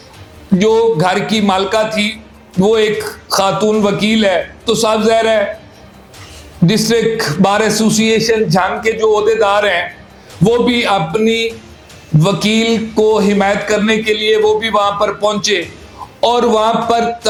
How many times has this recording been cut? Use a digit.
0